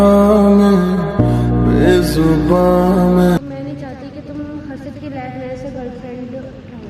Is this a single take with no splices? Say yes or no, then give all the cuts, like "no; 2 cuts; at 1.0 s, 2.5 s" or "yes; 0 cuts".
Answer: no; 1 cut; at 3.4 s